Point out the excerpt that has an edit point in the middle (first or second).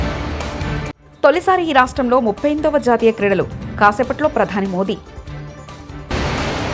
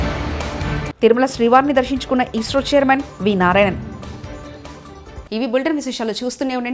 first